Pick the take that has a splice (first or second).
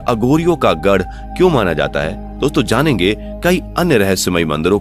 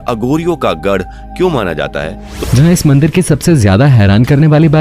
second